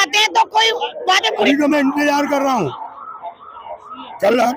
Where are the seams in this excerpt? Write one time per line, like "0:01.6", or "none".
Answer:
0:01.5